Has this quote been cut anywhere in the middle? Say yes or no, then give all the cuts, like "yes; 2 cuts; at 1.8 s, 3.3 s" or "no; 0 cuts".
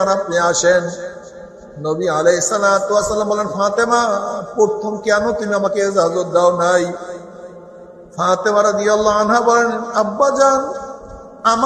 no; 0 cuts